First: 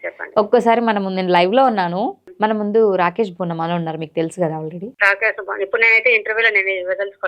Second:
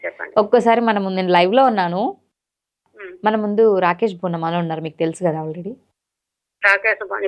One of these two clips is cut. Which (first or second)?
first